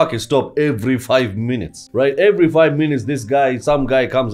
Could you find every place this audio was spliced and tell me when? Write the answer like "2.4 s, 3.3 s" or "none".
1.8 s